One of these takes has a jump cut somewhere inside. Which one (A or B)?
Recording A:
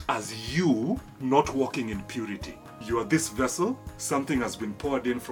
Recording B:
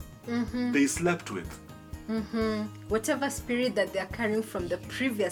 A